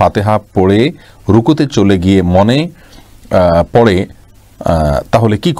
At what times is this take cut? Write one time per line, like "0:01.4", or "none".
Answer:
none